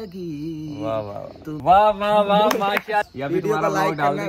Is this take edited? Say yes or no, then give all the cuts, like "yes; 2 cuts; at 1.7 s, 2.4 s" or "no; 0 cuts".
yes; 2 cuts; at 1.6 s, 3.1 s